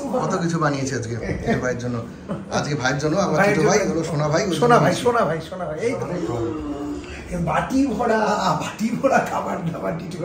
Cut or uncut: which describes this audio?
cut